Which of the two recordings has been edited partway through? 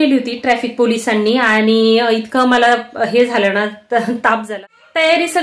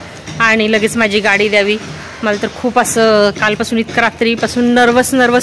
first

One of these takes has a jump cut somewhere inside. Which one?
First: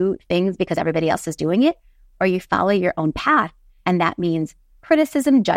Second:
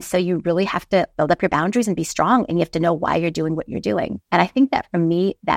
second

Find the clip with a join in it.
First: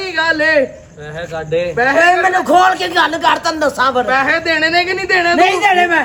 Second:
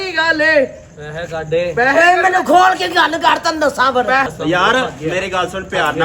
second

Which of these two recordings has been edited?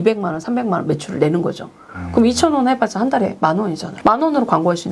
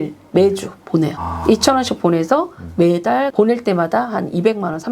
first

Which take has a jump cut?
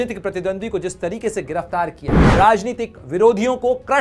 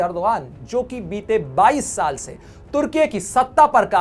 first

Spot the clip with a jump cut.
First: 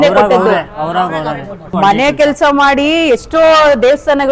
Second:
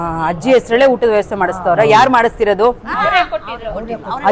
first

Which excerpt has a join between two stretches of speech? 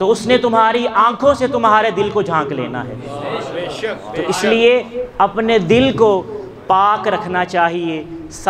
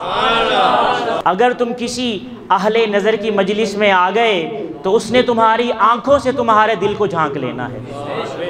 second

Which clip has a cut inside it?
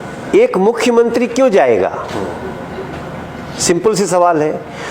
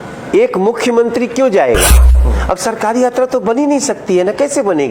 second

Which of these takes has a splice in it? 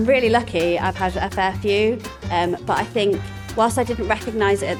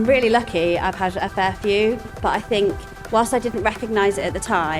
second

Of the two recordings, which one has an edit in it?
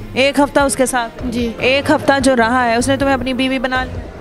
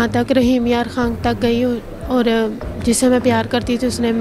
first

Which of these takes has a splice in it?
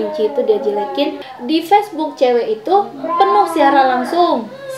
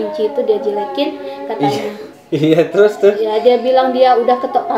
first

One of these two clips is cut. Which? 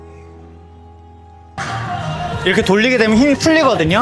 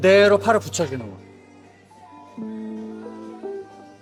first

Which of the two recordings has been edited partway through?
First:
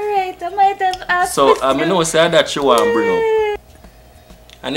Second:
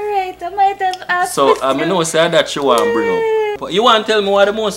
second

